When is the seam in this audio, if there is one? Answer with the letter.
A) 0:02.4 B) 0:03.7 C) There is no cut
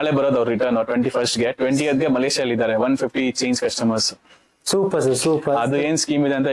C